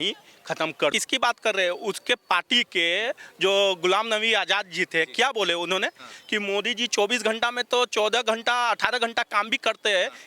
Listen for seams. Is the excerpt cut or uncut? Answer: cut